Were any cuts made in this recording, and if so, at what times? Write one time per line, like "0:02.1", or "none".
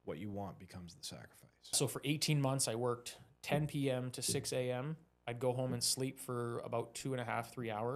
0:01.8